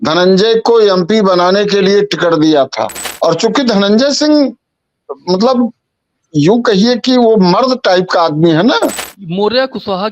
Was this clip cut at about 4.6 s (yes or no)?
no